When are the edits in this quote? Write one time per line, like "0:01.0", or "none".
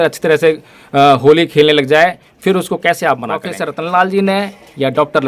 0:03.6